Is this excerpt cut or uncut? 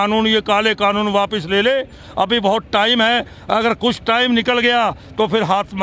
uncut